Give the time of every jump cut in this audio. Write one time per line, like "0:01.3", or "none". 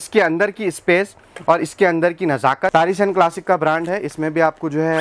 0:02.7